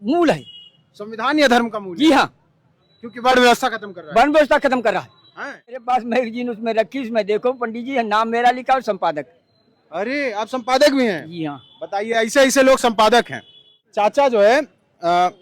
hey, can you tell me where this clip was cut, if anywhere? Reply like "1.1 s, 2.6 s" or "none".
5.8 s, 13.8 s